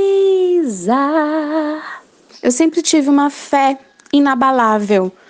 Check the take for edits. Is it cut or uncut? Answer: cut